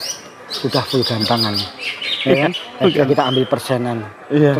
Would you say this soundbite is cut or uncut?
uncut